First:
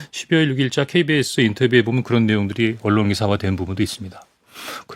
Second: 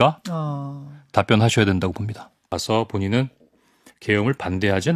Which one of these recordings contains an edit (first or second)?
second